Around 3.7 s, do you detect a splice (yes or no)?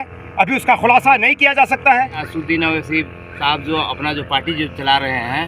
no